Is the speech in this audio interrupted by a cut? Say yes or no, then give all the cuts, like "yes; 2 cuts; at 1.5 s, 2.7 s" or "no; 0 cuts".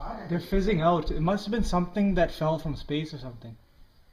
no; 0 cuts